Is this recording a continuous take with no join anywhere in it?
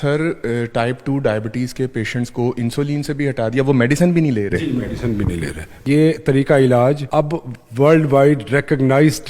no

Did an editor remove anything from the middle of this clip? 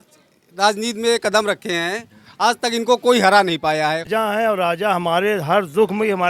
yes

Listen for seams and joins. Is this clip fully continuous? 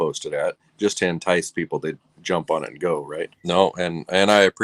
no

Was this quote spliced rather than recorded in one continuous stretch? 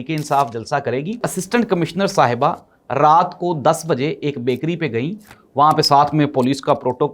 yes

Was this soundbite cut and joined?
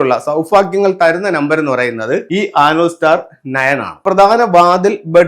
yes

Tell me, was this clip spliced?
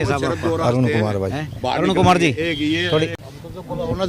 yes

